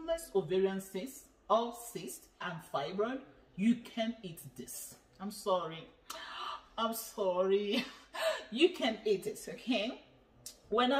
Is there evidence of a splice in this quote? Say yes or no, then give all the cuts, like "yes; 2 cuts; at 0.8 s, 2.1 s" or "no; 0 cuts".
yes; 1 cut; at 2.5 s